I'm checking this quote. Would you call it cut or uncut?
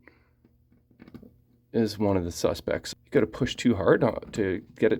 cut